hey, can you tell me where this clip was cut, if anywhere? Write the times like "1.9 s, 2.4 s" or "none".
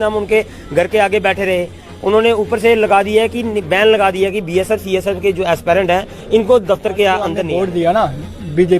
7.5 s